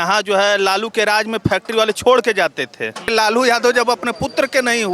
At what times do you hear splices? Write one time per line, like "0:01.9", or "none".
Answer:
0:03.1